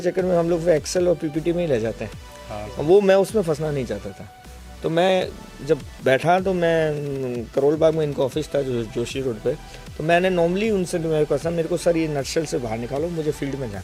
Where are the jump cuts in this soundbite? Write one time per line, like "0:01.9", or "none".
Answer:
none